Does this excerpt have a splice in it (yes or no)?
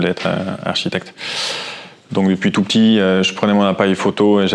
no